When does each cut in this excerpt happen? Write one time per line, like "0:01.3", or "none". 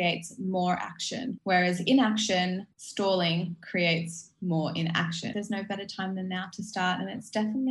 0:01.4
0:02.8
0:05.3